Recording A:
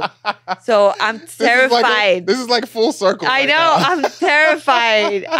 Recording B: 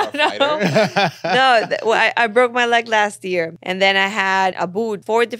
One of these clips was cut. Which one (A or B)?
B